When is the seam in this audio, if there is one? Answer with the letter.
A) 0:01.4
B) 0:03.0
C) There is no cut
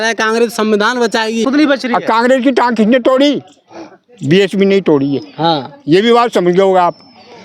A